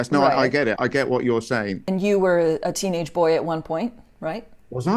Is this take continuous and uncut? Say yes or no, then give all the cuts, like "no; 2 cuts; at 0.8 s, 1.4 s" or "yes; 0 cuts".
no; 1 cut; at 1.8 s